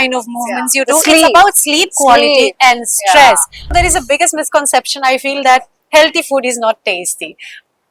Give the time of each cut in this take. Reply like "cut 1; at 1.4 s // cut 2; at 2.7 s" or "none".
cut 1; at 3.7 s